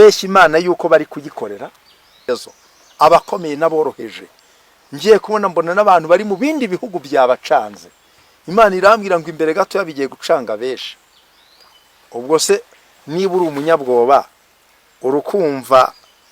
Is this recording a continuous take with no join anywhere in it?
no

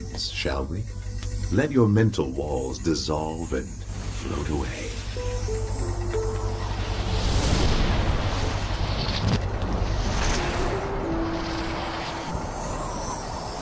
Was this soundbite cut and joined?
no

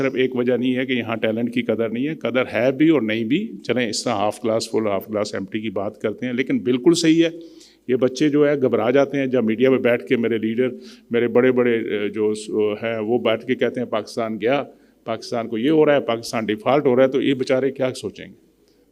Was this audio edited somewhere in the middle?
no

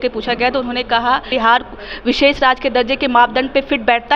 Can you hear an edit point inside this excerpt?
yes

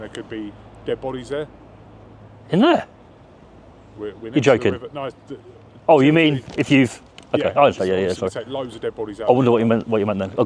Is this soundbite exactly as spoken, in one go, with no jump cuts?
yes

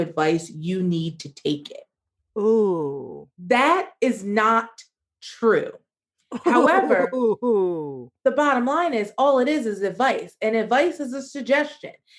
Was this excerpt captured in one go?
no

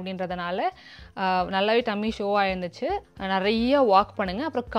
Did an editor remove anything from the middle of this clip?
yes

